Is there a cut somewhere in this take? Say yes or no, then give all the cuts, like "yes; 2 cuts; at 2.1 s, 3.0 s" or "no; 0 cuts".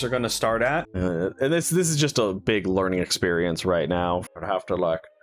yes; 2 cuts; at 0.9 s, 4.3 s